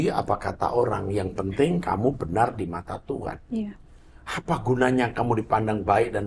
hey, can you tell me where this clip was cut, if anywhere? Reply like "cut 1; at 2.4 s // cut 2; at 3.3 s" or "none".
none